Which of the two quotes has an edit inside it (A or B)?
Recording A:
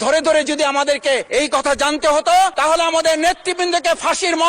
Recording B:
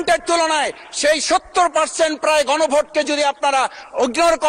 A